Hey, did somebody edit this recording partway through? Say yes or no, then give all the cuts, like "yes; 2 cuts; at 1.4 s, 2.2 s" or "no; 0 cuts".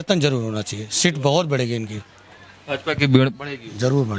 no; 0 cuts